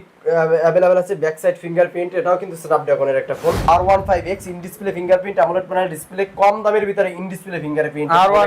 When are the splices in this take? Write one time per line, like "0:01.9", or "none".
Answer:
0:03.7